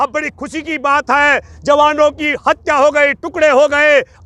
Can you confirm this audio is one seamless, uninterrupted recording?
yes; 0 cuts

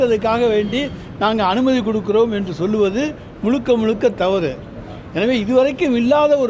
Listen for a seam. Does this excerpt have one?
no; 0 cuts

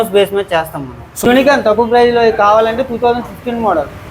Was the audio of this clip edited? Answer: yes; 1 cut; at 1.2 s

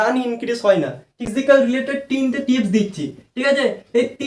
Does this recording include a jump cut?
yes; 1 cut; at 1.3 s

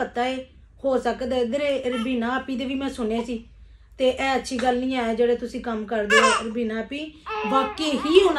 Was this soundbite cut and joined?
no; 0 cuts

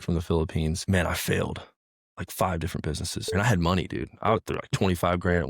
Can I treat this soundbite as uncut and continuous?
no; 2 cuts; at 0.8 s, 3.3 s

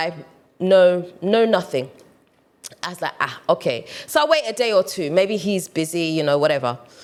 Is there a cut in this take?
no; 0 cuts

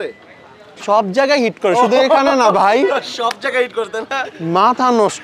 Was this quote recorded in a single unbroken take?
no; 1 cut; at 4.3 s

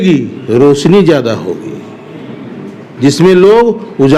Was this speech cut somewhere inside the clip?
no; 0 cuts

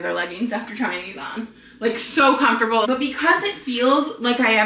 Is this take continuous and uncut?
no; 1 cut; at 2.9 s

